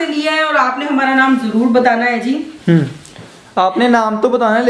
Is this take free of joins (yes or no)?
yes